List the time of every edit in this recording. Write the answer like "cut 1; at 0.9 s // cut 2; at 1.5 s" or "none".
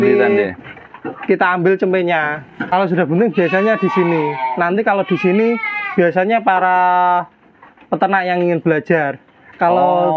cut 1; at 2.5 s